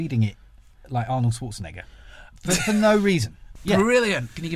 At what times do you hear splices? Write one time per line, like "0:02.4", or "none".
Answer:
0:02.3
0:03.5